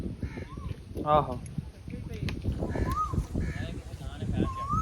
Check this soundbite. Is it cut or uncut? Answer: uncut